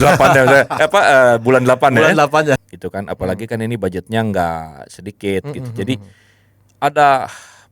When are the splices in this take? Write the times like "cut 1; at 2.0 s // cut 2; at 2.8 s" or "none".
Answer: cut 1; at 2.6 s